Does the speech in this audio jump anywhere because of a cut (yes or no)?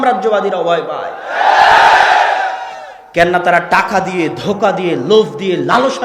no